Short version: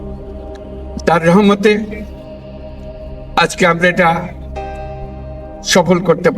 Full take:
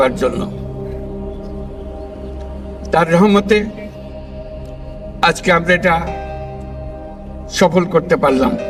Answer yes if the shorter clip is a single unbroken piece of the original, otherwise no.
no